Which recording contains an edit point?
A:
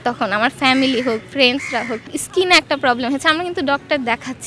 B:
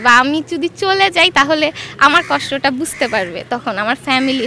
A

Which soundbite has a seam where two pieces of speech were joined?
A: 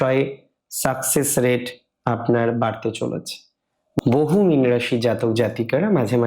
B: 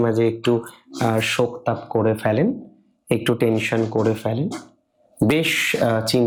A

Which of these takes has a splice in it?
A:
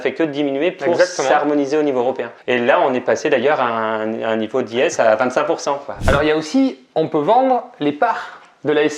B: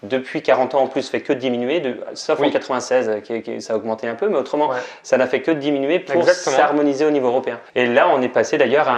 A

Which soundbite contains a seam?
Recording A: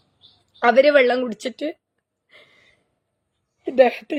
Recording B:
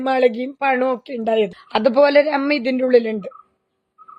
B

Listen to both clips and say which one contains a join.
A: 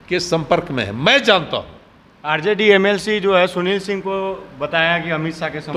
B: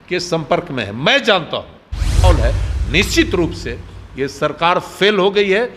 B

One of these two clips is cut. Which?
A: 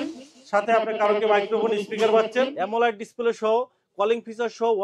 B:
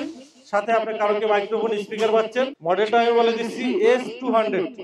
A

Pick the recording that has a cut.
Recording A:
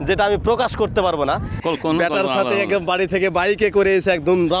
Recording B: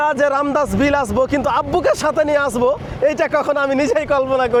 A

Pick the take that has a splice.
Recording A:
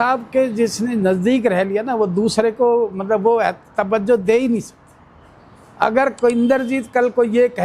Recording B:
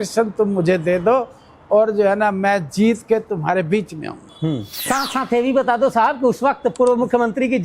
B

